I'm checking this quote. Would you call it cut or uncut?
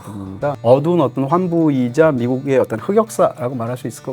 uncut